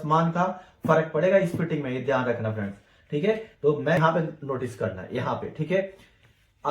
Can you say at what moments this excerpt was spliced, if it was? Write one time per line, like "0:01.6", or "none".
0:04.0